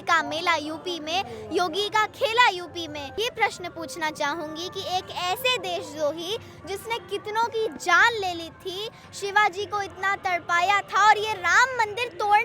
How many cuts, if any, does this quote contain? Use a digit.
1